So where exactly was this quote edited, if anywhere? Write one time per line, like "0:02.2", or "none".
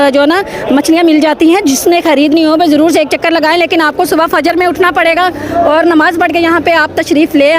none